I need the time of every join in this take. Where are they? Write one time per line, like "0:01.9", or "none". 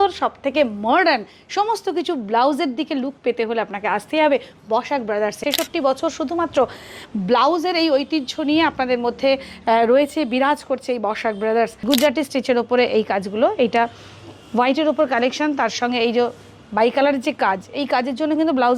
0:05.4
0:11.8